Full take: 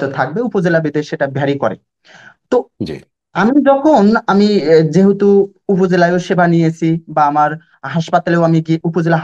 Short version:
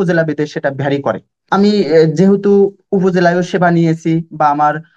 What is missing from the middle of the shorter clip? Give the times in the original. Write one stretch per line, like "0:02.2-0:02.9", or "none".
0:02.0-0:04.2